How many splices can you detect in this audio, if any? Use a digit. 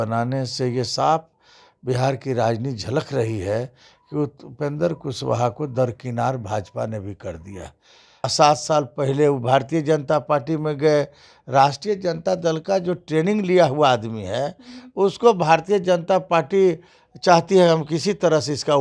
1